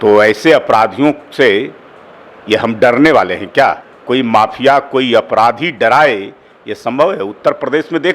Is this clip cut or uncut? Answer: cut